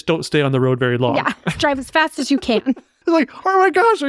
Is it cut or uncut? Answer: cut